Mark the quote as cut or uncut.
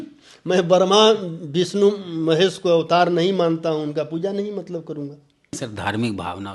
cut